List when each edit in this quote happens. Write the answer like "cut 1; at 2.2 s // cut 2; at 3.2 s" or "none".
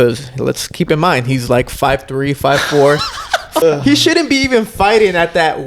cut 1; at 3.6 s